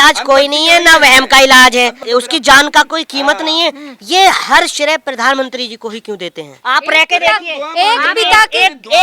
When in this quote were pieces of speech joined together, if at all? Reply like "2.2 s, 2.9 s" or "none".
2.0 s, 6.5 s